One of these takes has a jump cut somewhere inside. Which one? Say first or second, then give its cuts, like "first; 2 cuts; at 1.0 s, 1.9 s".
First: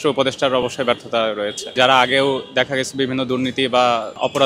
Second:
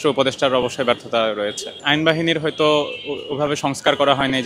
first; 1 cut; at 1.7 s